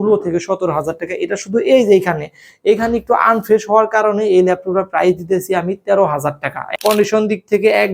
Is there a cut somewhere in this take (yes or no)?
yes